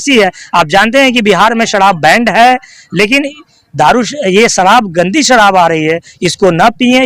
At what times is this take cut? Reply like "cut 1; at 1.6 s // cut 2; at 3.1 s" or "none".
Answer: none